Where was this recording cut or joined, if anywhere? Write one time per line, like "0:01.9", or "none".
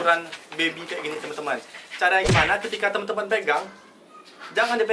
none